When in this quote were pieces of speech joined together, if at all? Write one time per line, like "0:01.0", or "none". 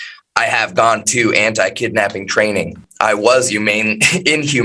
0:02.8